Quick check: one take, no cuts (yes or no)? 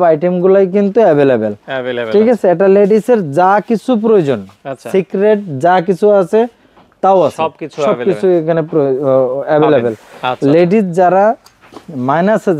yes